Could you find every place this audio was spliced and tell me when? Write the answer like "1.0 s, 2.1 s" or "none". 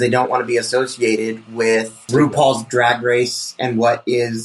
2.1 s